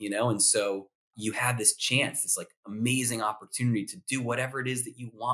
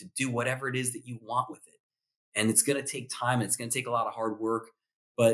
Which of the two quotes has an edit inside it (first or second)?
first